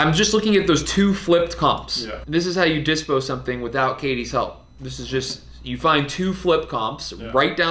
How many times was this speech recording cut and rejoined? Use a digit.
1